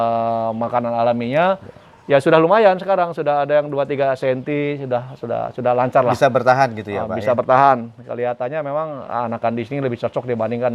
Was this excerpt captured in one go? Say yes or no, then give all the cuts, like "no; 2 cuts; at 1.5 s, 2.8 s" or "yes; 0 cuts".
yes; 0 cuts